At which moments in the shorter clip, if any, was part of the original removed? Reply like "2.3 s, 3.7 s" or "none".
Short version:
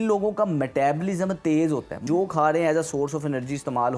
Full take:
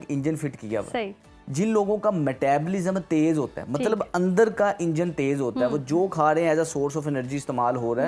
2.0 s